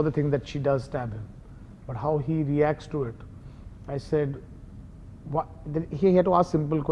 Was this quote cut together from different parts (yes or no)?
no